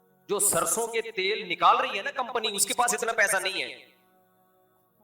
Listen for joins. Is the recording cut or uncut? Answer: cut